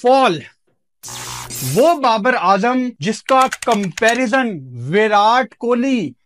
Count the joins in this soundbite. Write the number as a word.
one